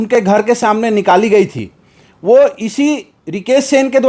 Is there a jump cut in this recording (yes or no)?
no